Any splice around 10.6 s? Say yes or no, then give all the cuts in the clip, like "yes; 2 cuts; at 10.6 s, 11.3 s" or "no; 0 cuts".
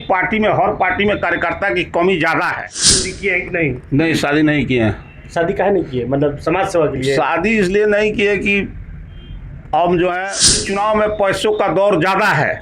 yes; 2 cuts; at 3.1 s, 10.6 s